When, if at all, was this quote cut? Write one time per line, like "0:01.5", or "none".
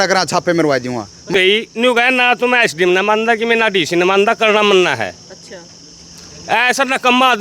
0:01.3